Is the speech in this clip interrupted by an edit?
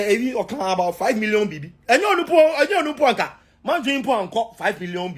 no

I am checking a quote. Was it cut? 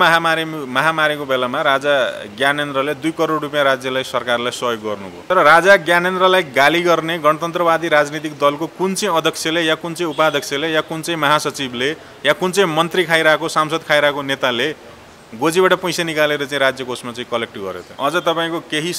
yes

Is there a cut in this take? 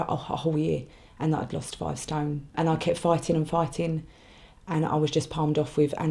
yes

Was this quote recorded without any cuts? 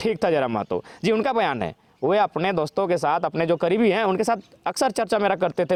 yes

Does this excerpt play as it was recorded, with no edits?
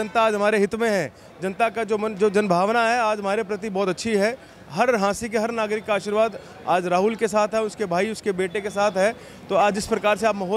yes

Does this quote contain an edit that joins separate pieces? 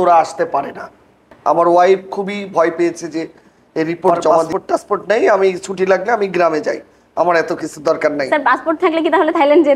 yes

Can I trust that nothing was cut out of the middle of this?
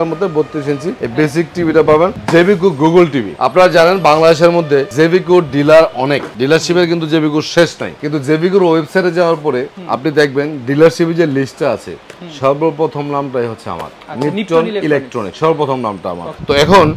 yes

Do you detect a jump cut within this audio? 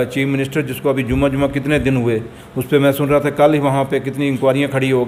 no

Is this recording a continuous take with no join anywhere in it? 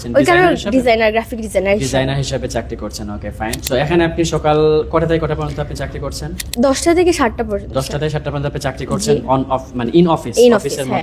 yes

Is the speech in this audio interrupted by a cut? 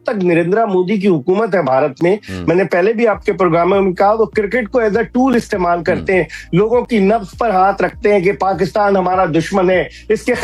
no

